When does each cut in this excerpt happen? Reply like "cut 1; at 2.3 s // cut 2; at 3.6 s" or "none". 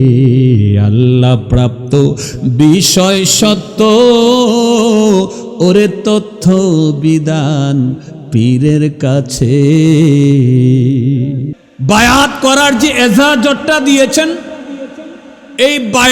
cut 1; at 11.5 s